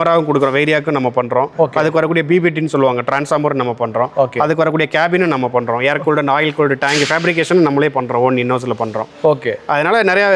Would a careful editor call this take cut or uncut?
uncut